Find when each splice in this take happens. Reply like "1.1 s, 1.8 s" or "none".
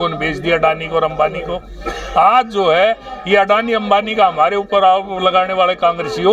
none

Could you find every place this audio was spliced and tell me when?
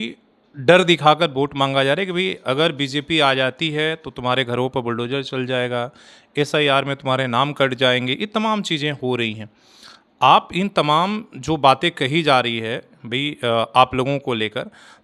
none

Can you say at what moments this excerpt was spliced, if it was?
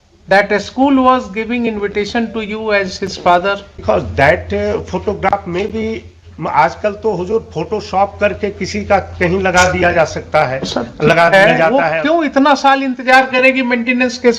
3.8 s, 11.8 s

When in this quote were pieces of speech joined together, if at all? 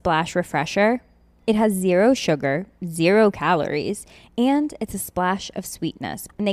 none

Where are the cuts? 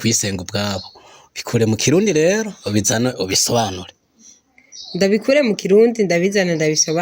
none

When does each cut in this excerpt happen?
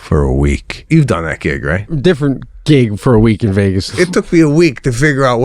0.9 s, 1.9 s, 3.9 s

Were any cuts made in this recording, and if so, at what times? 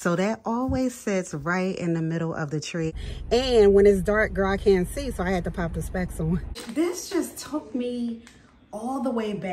3.0 s, 6.6 s

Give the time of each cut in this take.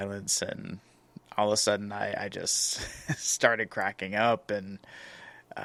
none

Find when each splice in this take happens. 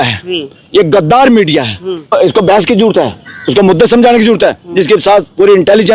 2.1 s

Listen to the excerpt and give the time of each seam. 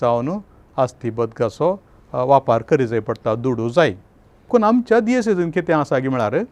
4.5 s

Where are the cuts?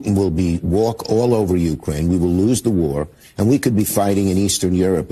none

